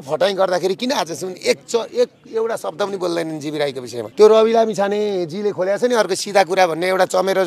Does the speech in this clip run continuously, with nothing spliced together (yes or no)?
no